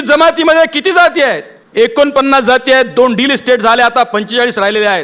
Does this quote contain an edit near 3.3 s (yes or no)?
no